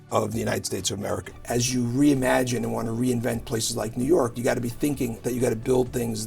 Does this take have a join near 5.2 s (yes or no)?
yes